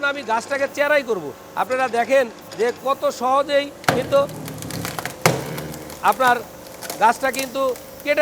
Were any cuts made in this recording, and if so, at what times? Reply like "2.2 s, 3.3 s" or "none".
none